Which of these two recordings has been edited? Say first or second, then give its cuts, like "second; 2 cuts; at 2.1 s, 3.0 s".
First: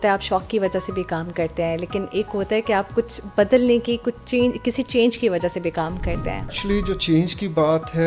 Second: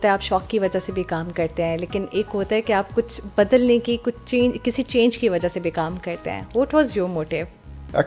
first; 1 cut; at 6.5 s